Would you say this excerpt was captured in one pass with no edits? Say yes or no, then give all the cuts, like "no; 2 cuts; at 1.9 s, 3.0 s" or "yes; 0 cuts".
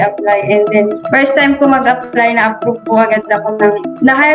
no; 1 cut; at 1.0 s